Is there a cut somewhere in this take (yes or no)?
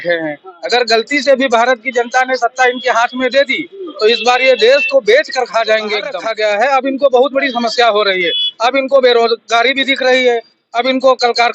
yes